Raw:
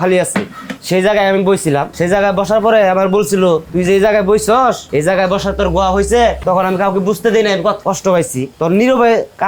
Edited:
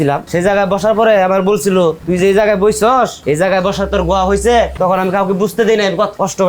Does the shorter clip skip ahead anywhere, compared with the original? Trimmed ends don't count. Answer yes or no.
no